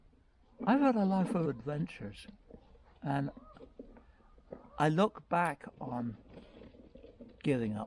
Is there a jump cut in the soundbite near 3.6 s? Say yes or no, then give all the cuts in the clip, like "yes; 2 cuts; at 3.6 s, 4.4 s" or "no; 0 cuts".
no; 1 cut; at 1.4 s